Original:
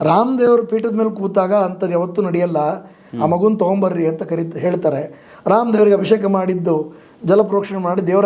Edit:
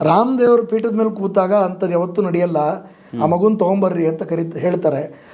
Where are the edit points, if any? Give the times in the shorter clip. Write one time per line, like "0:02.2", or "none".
none